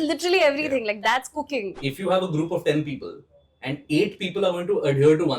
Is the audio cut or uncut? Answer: cut